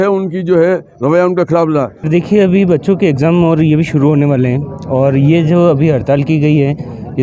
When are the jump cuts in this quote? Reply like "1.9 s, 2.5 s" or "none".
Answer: 2.1 s